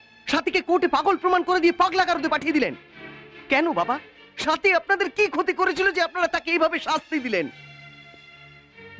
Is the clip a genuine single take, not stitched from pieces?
yes; 0 cuts

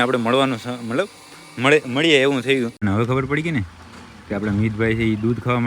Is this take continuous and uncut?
no; 1 cut; at 2.8 s

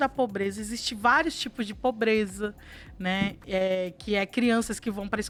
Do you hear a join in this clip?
no; 0 cuts

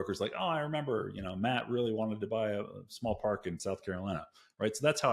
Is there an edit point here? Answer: no; 0 cuts

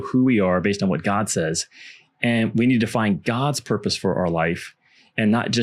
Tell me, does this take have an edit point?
no; 0 cuts

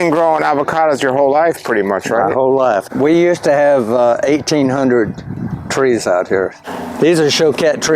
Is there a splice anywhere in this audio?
yes; 2 cuts; at 2.8 s, 6.6 s

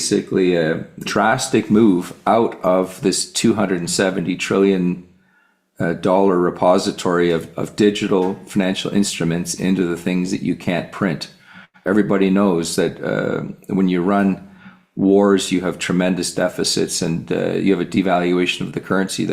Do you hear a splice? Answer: yes; 1 cut; at 1.1 s

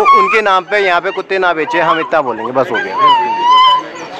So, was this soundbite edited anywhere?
no; 0 cuts

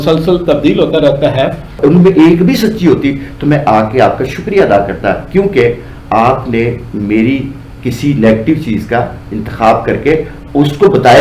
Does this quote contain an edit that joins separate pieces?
yes; 1 cut; at 1.6 s

